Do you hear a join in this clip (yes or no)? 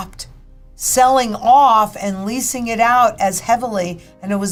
no